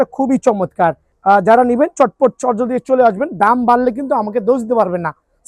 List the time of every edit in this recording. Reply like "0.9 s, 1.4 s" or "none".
1.1 s